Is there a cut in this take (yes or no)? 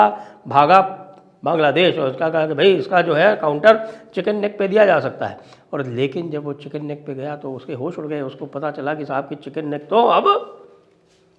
no